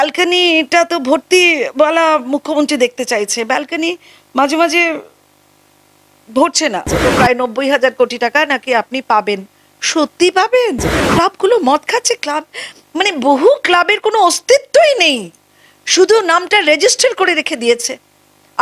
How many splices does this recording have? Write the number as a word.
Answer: two